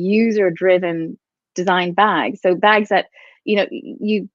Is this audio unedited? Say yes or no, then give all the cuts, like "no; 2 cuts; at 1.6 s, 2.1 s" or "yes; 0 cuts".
yes; 0 cuts